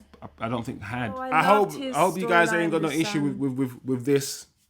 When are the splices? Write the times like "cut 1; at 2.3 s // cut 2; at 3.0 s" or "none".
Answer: cut 1; at 1.3 s